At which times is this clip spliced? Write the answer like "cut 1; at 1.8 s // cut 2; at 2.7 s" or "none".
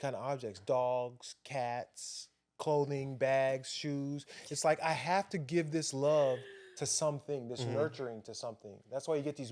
none

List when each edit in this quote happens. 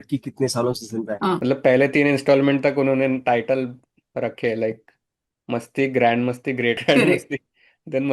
cut 1; at 1.4 s // cut 2; at 6.8 s

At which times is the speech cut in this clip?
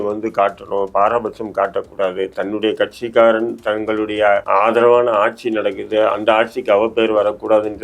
cut 1; at 4.4 s

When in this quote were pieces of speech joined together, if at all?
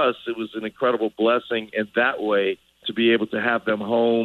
cut 1; at 2.9 s

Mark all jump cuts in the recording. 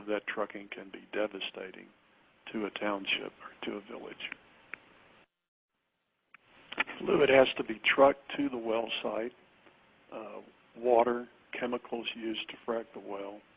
none

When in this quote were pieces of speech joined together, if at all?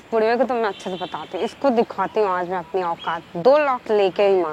none

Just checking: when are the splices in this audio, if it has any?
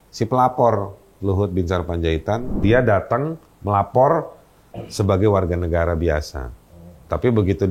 cut 1; at 2.6 s

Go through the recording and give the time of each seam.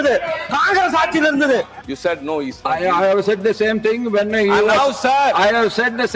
cut 1; at 1.8 s

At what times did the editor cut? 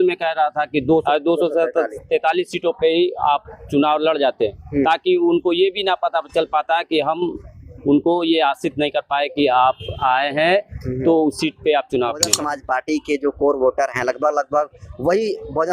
cut 1; at 1.0 s // cut 2; at 12.4 s

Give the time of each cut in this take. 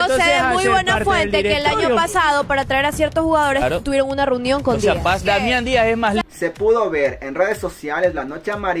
cut 1; at 6.2 s

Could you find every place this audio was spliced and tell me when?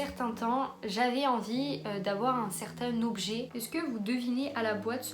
cut 1; at 3.6 s

